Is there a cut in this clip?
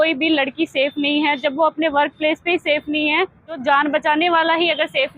yes; 1 cut; at 3.6 s

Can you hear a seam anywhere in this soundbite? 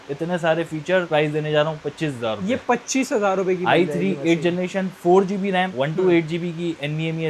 no; 0 cuts

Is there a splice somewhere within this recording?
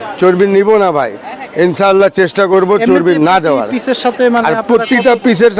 no; 0 cuts

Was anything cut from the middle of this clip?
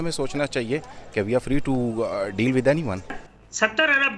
yes; 1 cut; at 3.1 s

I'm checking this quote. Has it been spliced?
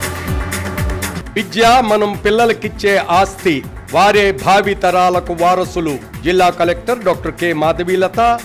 yes; 1 cut; at 1.2 s

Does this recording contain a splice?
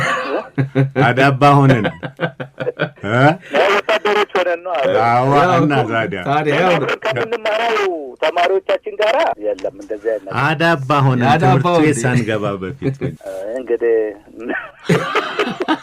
yes; 3 cuts; at 2.9 s, 9.3 s, 13.1 s

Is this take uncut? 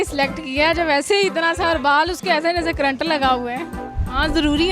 no; 1 cut; at 3.8 s

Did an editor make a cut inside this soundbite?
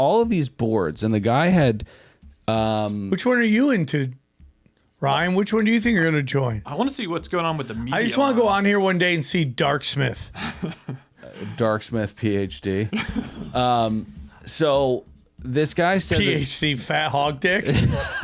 no; 0 cuts

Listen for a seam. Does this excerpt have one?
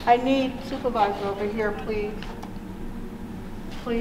no; 0 cuts

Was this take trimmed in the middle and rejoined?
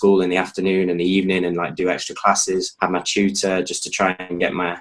no; 0 cuts

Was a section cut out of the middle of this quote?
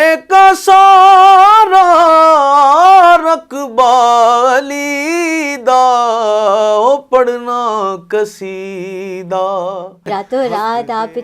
yes; 1 cut; at 10.1 s

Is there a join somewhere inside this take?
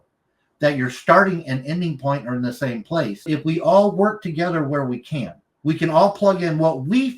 yes; 2 cuts; at 3.2 s, 5.4 s

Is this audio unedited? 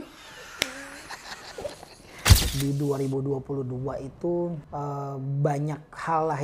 no; 2 cuts; at 2.2 s, 4.6 s

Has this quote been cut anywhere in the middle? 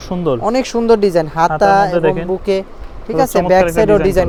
no; 0 cuts

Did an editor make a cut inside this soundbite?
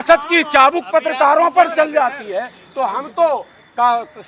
no; 0 cuts

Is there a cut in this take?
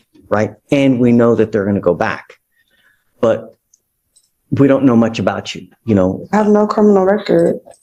no; 0 cuts

